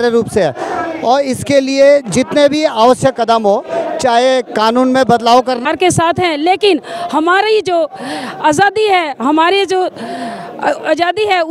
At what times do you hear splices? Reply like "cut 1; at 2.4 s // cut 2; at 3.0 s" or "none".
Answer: cut 1; at 5.6 s

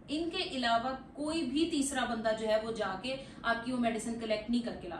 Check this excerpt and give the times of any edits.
none

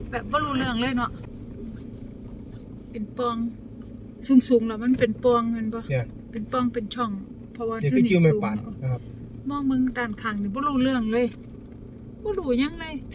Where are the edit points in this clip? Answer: cut 1; at 1.2 s

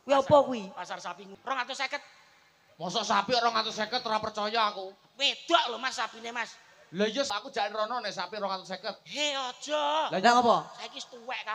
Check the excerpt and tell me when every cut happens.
cut 1; at 1.3 s // cut 2; at 7.3 s

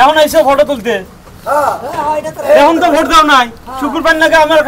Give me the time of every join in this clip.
none

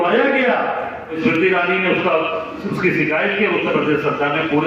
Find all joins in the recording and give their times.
cut 1; at 1.2 s

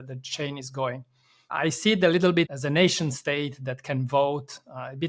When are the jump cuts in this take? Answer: cut 1; at 1.5 s // cut 2; at 2.5 s

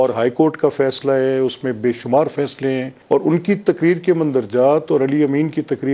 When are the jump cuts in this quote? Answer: cut 1; at 2.9 s

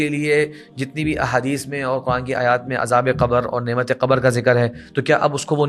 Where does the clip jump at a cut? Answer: none

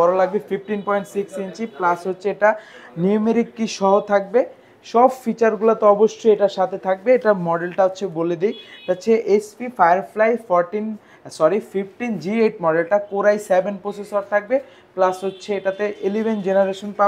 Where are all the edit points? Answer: none

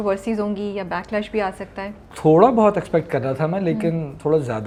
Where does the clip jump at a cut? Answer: none

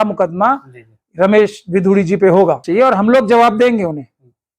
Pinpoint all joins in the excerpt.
cut 1; at 2.6 s

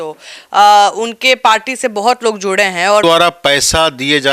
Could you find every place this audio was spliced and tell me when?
cut 1; at 3.0 s

